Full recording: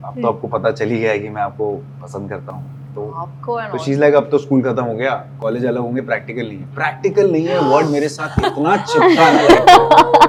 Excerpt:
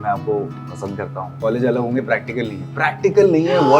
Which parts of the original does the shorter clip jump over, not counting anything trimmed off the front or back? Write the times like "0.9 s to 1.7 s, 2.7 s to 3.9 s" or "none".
2.6 s to 5.3 s